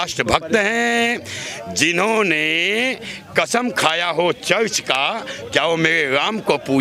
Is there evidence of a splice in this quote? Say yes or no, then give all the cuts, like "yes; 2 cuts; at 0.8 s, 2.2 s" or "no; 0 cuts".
no; 0 cuts